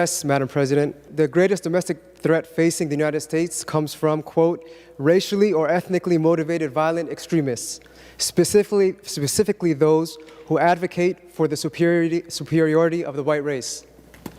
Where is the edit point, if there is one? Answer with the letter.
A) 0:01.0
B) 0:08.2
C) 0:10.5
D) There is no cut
A